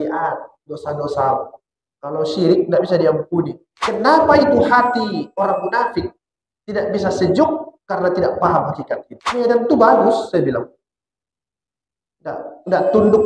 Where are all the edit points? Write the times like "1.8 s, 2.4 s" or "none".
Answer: 3.7 s, 9.1 s